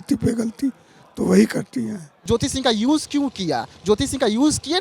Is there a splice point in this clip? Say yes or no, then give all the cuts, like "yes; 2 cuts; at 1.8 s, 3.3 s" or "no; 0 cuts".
yes; 1 cut; at 2.1 s